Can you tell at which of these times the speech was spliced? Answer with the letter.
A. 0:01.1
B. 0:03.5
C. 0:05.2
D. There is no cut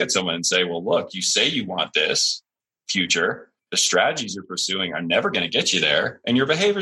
B